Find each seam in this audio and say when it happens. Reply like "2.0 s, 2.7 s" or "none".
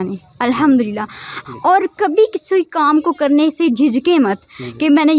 1.4 s